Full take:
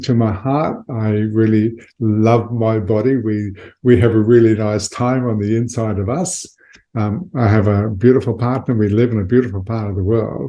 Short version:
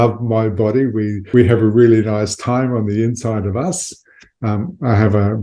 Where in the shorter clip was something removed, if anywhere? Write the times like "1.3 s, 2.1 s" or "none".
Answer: 1.2 s